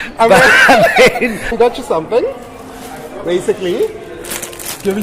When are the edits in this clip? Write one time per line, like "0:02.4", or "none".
0:01.5